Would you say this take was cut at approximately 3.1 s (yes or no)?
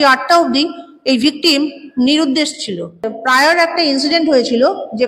yes